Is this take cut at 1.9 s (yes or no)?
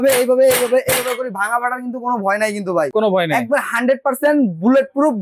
no